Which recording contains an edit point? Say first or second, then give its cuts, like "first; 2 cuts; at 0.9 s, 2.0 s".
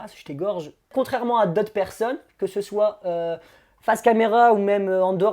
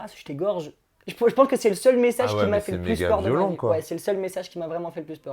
first; 1 cut; at 0.9 s